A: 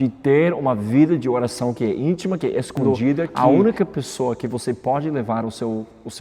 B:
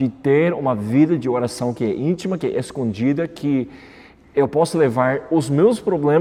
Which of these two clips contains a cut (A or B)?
A